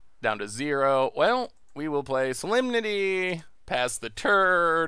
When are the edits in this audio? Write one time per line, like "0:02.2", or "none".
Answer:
none

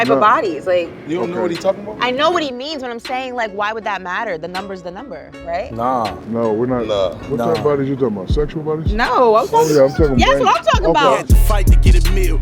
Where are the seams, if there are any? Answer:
0:11.3

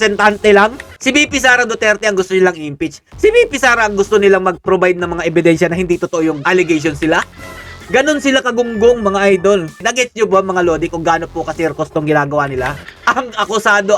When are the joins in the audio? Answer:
0:00.9
0:09.8

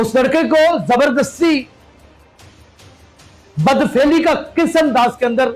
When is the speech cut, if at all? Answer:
0:01.7
0:03.5

